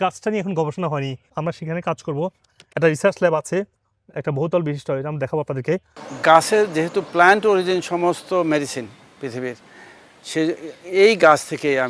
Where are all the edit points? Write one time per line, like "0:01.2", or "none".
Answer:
0:01.2
0:06.0